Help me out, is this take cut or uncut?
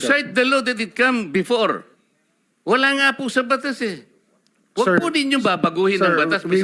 uncut